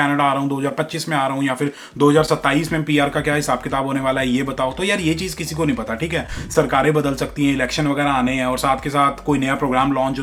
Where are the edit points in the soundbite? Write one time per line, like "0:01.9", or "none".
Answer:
none